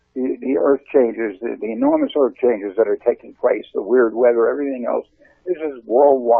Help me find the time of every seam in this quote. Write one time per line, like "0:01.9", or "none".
none